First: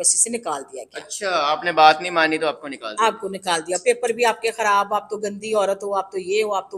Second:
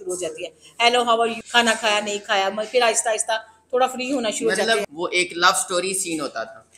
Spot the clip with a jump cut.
second; 2 cuts; at 1.4 s, 4.8 s

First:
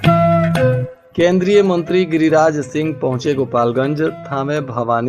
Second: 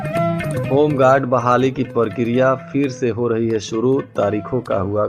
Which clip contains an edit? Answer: first; 1 cut; at 0.9 s

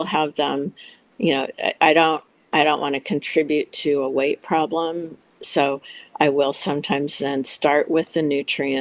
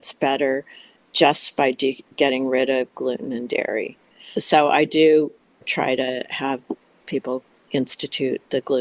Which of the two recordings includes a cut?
second; 4 cuts; at 2.1 s, 4.4 s, 5.7 s, 7.6 s

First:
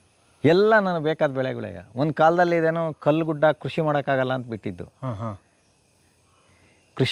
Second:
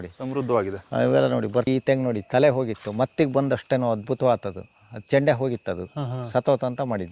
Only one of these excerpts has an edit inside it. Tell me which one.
second; 1 cut; at 1.7 s

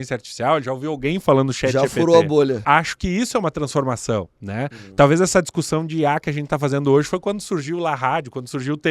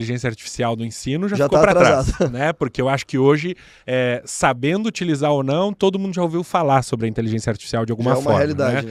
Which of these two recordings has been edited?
first; 1 cut; at 2.6 s

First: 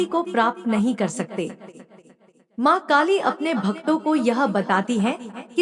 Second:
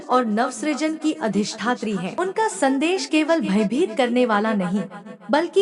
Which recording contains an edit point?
second; 1 cut; at 2.1 s

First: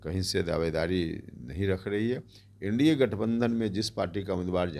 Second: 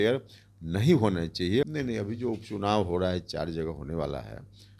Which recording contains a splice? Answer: second; 1 cut; at 1.7 s

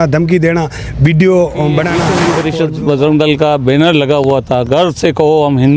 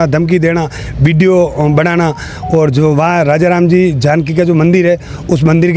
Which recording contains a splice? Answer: first; 1 cut; at 2.3 s

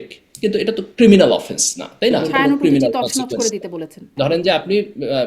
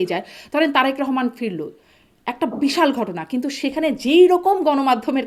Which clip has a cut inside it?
first; 2 cuts; at 2.2 s, 4.1 s

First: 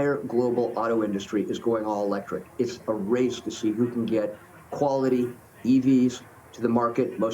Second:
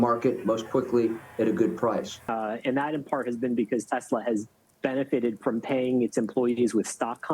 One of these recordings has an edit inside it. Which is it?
second; 1 cut; at 2.2 s

